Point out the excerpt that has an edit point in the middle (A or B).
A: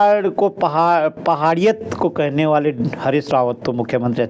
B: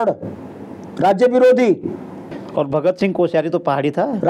B